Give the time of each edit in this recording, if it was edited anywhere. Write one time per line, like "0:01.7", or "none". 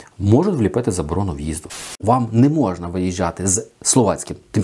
0:01.9